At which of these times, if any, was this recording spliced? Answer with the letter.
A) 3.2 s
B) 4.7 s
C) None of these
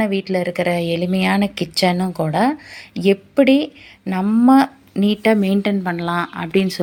C